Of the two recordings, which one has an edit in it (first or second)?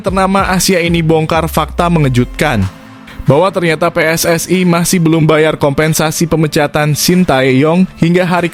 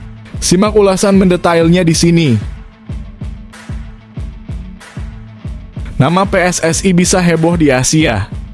second